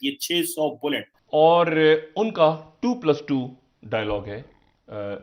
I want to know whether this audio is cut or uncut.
cut